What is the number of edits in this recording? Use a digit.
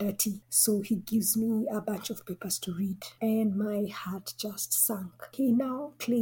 1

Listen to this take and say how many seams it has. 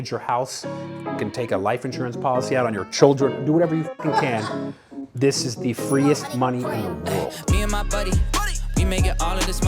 1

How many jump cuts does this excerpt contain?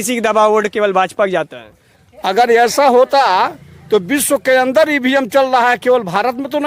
0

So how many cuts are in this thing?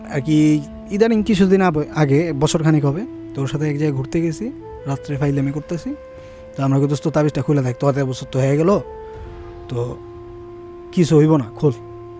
0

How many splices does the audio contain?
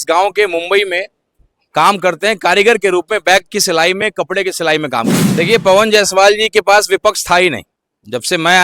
1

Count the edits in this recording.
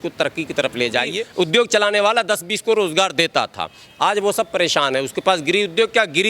1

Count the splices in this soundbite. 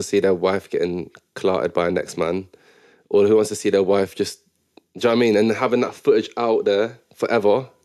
0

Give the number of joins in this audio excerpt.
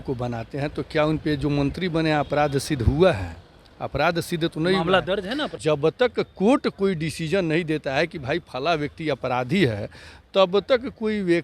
1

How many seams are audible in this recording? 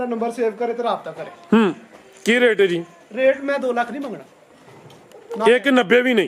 0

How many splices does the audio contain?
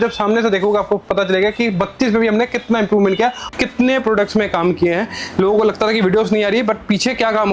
1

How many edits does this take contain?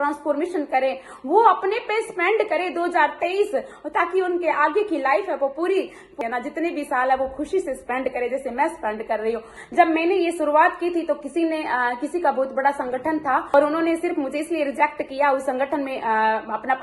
3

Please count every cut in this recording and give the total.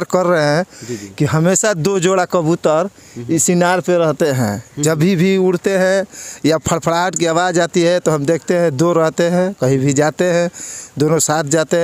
0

